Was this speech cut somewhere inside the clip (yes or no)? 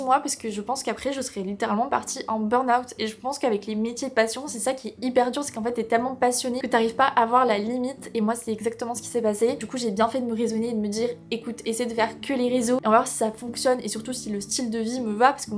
no